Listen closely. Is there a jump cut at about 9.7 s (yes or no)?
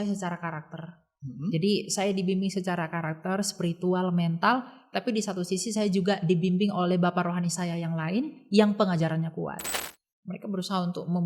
yes